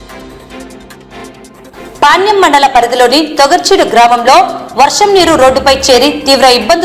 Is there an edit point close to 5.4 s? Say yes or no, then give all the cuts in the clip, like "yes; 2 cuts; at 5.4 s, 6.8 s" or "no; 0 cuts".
no; 1 cut; at 1.2 s